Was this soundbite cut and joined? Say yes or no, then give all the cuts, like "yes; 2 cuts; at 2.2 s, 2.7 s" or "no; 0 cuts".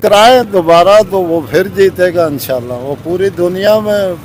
no; 0 cuts